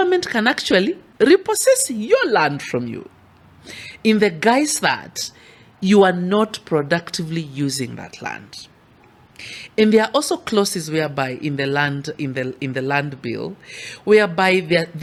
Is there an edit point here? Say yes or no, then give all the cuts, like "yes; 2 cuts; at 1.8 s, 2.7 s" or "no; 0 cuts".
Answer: no; 0 cuts